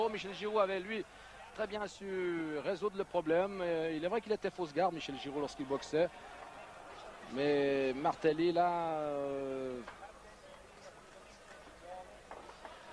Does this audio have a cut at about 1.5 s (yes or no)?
yes